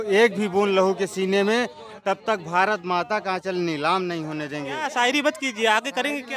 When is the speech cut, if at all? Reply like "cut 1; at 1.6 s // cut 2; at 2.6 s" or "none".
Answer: cut 1; at 4.9 s